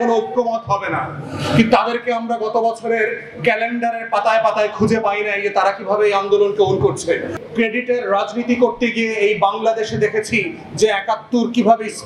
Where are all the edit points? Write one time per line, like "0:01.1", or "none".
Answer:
0:07.3

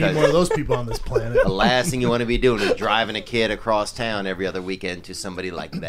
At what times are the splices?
none

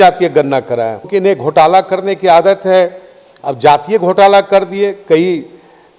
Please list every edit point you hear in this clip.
0:01.1

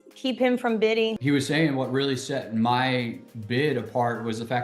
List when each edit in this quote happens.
0:01.2

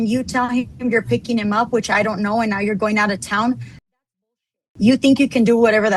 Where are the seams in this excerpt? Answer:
none

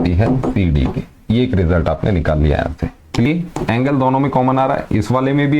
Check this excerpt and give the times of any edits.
0:03.3

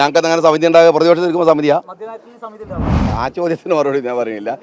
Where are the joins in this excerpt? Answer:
0:03.1

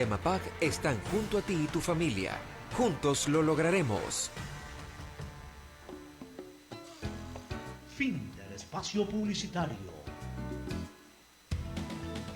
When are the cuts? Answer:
0:05.7

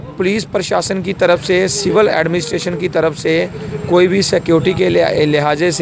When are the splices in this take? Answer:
none

